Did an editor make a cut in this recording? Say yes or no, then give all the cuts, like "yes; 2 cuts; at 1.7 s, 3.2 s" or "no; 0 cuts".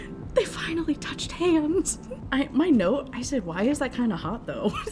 yes; 1 cut; at 2.1 s